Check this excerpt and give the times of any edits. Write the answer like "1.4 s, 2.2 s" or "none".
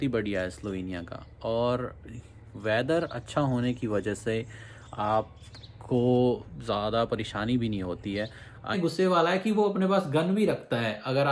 8.7 s